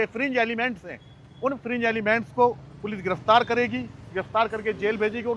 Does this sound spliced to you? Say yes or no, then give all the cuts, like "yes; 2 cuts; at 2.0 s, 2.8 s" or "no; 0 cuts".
no; 0 cuts